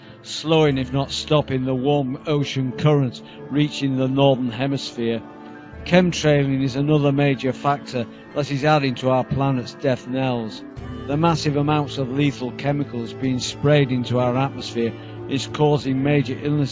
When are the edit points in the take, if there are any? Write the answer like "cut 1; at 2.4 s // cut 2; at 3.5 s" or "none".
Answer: cut 1; at 4.0 s